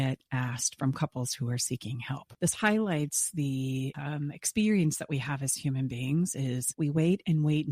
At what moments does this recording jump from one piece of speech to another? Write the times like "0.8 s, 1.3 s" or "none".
2.2 s, 4.0 s, 6.7 s